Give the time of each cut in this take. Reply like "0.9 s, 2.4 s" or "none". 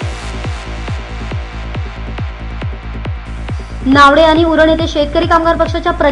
none